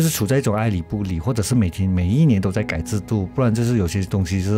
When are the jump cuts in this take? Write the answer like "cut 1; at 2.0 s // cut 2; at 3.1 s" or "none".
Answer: none